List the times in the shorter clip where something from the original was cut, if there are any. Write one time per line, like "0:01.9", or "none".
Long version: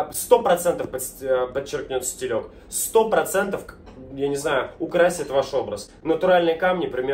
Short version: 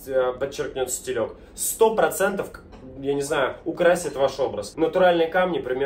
0:04.6